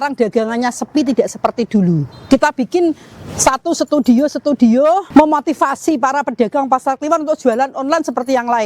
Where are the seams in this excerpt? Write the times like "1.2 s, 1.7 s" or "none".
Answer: 2.1 s, 5.0 s